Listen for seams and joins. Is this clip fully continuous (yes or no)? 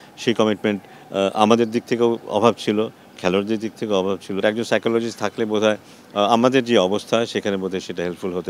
no